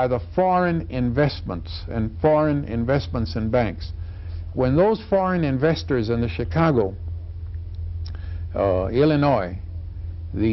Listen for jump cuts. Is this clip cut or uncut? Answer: uncut